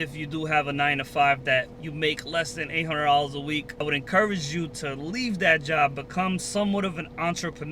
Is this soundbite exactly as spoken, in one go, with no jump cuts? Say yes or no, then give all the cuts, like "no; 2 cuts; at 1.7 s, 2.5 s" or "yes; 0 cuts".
yes; 0 cuts